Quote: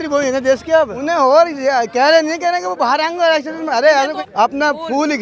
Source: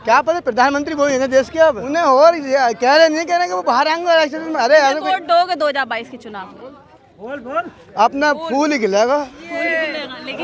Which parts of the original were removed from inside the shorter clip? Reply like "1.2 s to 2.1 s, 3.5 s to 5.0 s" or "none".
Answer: 5.0 s to 7.8 s

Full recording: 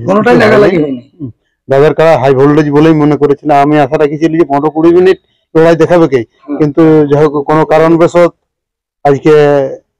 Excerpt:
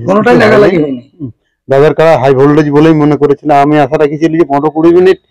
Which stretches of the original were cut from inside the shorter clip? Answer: none

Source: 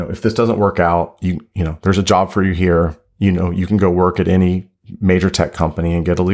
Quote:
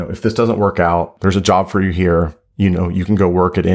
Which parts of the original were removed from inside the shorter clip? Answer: 1.1 s to 1.8 s

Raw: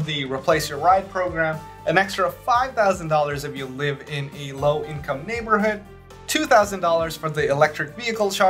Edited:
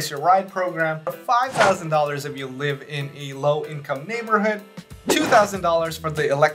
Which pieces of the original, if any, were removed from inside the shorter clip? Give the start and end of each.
1.8 s to 2.4 s

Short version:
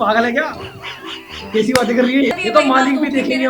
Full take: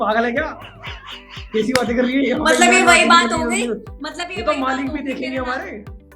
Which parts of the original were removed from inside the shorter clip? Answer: 2.3 s to 4.3 s

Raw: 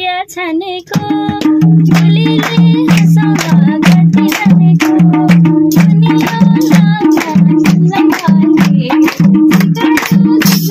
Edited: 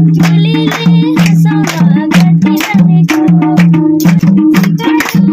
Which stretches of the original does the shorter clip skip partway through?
5.9 s to 9.2 s

